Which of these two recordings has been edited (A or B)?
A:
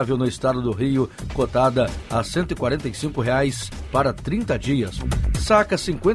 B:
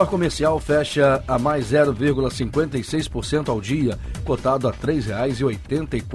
A